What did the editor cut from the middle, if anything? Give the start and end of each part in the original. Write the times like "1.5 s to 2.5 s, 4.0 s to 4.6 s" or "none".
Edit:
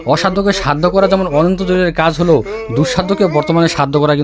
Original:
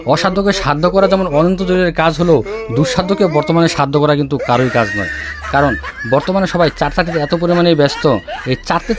none